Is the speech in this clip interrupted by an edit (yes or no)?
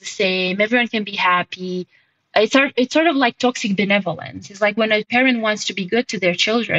yes